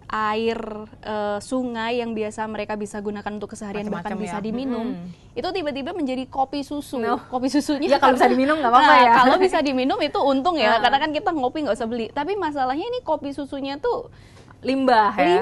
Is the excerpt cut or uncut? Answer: uncut